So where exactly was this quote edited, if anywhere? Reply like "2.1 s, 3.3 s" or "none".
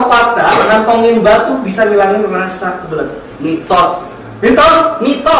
none